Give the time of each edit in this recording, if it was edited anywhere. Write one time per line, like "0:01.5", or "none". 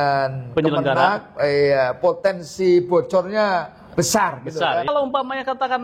0:04.8